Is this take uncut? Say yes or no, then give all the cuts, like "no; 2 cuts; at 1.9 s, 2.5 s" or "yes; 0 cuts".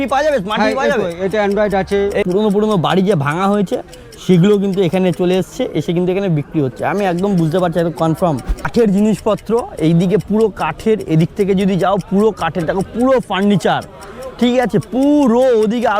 no; 2 cuts; at 2.3 s, 8.6 s